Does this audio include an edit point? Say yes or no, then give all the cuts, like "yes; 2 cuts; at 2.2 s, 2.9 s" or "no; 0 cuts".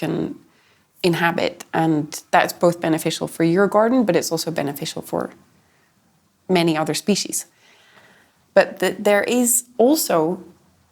yes; 1 cut; at 7.4 s